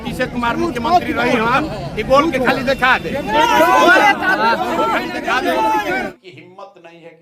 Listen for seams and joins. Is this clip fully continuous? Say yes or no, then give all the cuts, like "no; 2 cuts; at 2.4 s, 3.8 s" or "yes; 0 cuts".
no; 1 cut; at 5.9 s